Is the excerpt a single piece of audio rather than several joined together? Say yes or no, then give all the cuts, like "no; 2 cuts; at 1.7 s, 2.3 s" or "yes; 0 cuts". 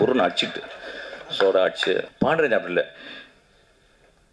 no; 1 cut; at 2.1 s